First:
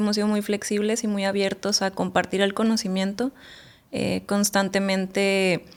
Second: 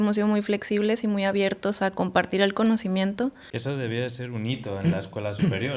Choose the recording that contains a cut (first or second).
second